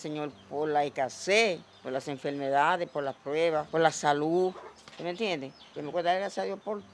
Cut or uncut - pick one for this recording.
uncut